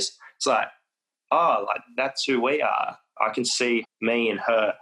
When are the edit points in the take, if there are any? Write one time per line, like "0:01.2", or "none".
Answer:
0:03.0
0:03.9